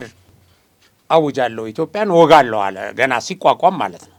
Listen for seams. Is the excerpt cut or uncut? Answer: uncut